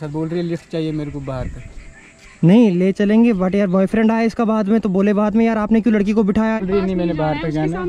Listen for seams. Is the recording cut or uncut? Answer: cut